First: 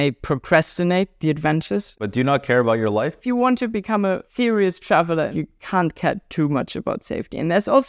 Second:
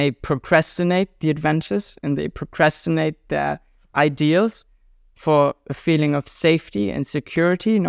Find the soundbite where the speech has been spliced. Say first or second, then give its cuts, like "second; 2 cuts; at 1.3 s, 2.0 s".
first; 4 cuts; at 1.9 s, 3.2 s, 4.3 s, 5.3 s